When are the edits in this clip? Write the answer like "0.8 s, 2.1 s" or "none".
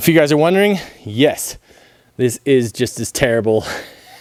none

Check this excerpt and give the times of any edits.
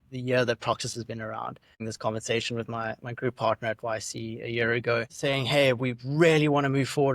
1.7 s

